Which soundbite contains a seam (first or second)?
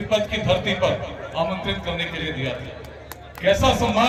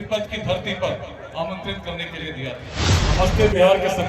second